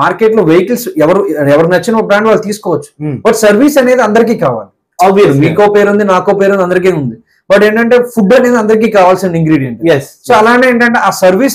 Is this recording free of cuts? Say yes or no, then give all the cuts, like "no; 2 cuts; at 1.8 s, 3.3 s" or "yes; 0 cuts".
yes; 0 cuts